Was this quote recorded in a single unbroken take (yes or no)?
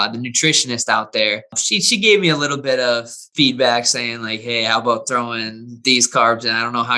no